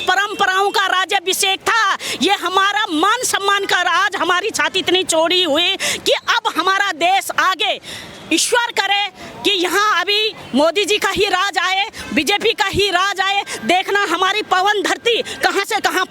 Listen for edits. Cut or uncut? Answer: uncut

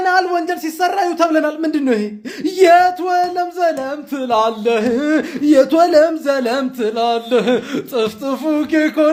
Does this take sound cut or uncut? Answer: uncut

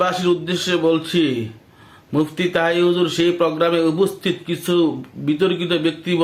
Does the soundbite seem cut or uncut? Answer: uncut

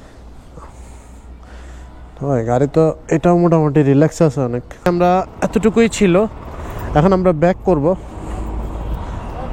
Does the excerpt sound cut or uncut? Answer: cut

